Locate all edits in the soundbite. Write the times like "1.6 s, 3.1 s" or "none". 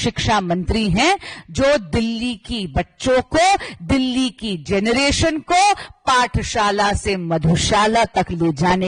none